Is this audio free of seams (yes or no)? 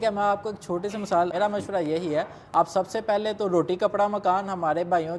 no